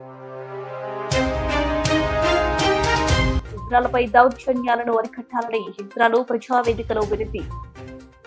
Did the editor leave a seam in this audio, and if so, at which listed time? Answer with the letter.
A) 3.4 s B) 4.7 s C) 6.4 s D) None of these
A